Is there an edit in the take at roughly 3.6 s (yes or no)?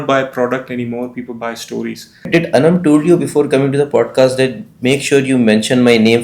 no